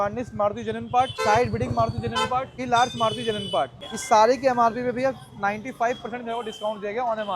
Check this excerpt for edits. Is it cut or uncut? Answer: cut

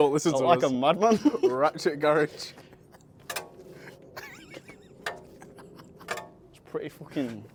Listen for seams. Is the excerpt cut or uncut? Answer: uncut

